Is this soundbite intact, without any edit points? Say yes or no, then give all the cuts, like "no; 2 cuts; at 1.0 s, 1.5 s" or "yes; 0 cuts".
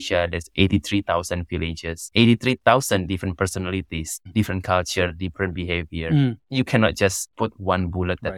yes; 0 cuts